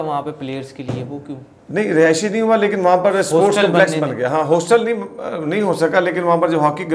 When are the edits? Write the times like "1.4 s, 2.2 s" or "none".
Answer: none